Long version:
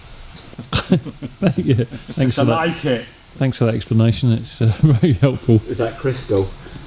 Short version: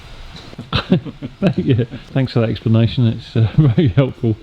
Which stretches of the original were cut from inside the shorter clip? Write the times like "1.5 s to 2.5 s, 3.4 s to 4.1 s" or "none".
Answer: 2.0 s to 3.2 s